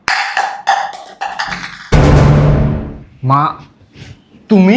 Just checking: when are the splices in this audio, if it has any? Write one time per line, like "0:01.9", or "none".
none

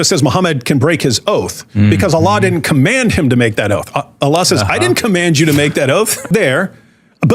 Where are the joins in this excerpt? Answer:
0:06.2

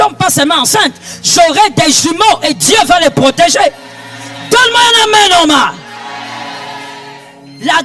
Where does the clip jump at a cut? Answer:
none

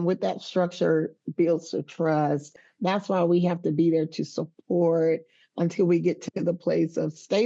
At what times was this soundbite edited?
0:02.5

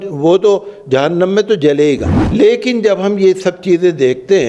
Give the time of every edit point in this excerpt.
0:02.1

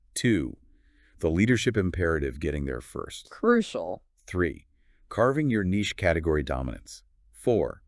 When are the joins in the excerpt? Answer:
none

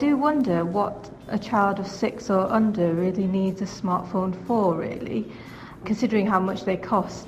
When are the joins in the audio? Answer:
0:01.2
0:05.8

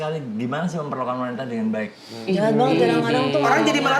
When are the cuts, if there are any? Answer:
0:02.1

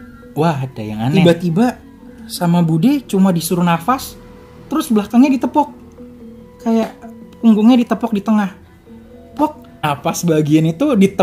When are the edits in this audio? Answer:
0:01.1
0:09.8

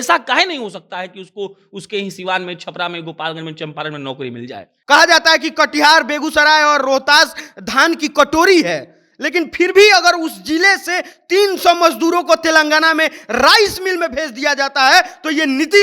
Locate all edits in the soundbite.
0:04.7

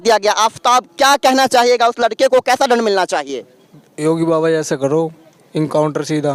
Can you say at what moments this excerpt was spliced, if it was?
none

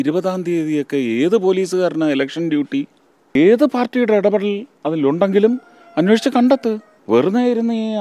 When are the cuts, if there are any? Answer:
0:03.3
0:06.9

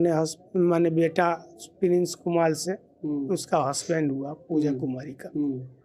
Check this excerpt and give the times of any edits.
none

